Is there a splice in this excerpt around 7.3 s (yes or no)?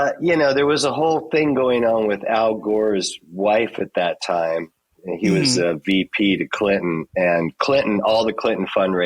no